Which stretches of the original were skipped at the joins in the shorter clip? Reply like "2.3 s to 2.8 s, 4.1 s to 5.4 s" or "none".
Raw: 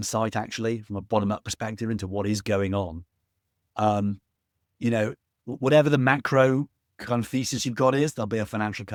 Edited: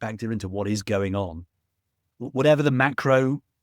3.6 s to 5.3 s